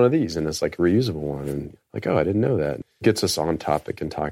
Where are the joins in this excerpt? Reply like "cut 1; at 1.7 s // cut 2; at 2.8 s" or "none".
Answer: cut 1; at 1.7 s // cut 2; at 3.0 s